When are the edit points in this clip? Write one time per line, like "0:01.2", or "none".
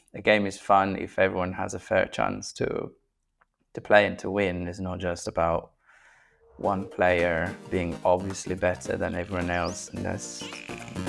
none